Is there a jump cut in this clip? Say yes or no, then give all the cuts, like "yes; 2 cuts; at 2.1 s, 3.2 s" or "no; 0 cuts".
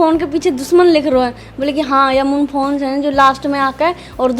no; 0 cuts